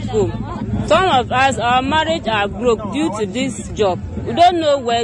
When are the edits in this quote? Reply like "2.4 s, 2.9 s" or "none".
none